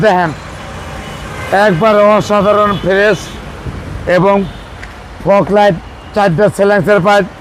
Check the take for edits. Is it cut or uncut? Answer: uncut